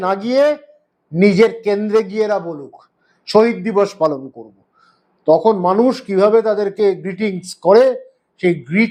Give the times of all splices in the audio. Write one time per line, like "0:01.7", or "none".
none